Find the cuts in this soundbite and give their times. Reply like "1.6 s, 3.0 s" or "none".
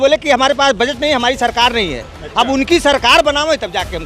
none